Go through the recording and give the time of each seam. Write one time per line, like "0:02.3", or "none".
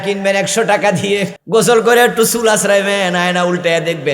0:01.4